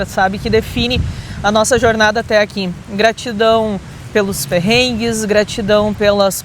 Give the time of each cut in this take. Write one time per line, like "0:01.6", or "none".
none